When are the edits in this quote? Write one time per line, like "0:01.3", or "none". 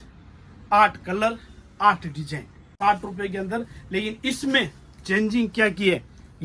0:02.7